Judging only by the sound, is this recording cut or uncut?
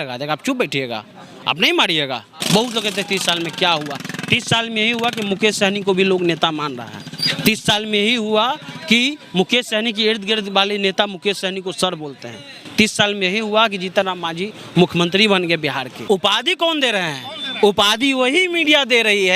cut